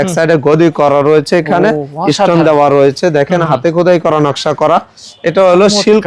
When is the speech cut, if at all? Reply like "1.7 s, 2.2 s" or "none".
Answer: none